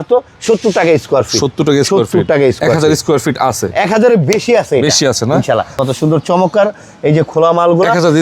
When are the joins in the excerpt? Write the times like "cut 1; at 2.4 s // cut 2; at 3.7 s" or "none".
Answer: cut 1; at 5.7 s